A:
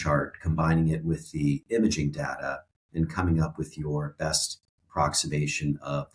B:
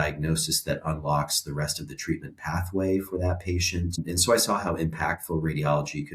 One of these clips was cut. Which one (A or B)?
B